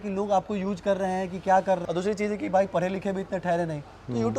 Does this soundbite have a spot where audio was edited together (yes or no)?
yes